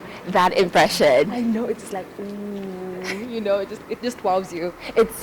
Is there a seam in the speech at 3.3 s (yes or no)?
no